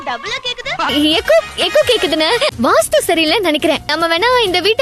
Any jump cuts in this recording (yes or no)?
no